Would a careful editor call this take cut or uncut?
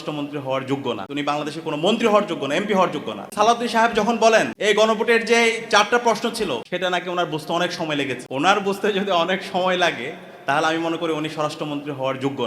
cut